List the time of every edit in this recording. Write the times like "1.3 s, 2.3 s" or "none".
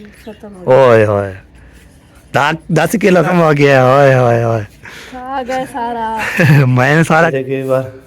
3.3 s, 7.3 s